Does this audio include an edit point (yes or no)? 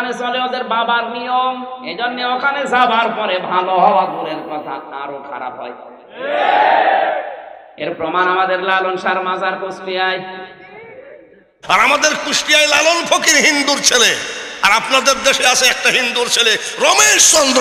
yes